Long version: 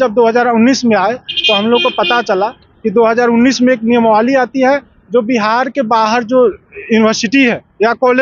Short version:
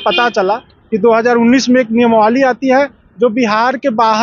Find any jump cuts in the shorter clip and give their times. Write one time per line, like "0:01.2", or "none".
none